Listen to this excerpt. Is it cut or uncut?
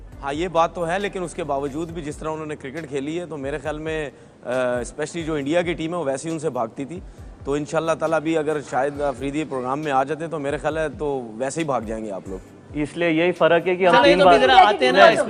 uncut